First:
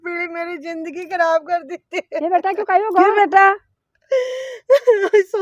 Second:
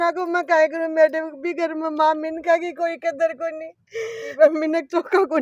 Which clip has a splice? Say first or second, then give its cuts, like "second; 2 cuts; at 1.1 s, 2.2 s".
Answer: second; 1 cut; at 4.2 s